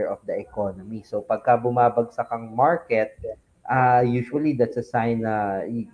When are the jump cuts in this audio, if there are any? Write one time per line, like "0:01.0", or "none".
none